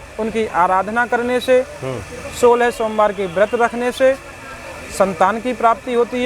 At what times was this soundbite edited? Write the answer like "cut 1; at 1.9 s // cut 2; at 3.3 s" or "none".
none